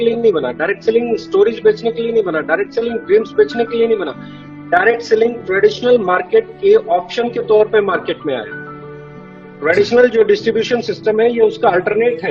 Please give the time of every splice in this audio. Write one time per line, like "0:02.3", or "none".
none